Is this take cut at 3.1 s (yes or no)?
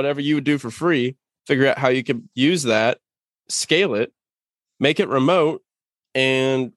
no